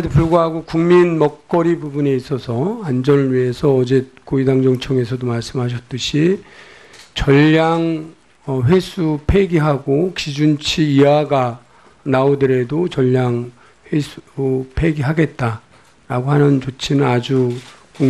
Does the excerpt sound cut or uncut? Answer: uncut